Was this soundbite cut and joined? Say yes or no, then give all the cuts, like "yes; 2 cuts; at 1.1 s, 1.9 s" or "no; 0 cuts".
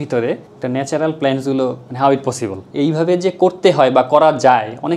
no; 0 cuts